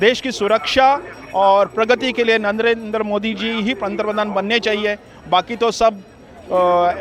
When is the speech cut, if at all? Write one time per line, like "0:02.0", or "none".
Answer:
none

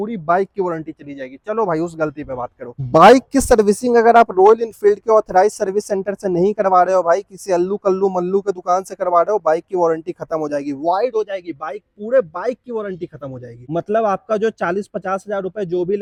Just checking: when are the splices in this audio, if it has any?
none

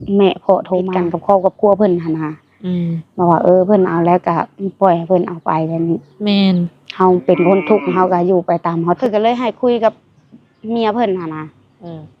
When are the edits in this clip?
0:01.0
0:09.0

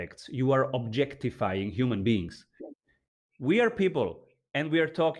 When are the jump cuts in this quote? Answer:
0:03.0

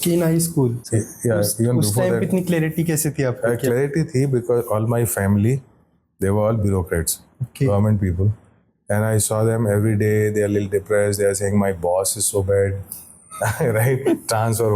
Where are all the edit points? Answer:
none

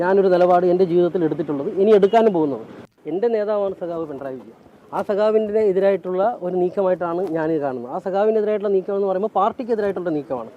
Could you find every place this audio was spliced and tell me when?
0:02.9

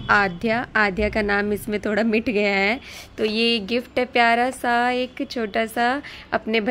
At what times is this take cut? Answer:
none

